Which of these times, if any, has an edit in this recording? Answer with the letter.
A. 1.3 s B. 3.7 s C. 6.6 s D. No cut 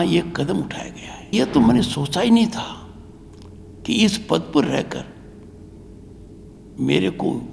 A